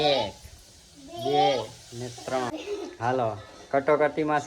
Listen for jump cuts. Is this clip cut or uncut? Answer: cut